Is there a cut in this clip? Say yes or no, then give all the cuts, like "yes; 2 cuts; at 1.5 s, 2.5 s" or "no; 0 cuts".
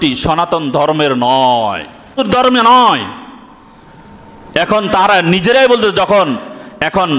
yes; 1 cut; at 2.2 s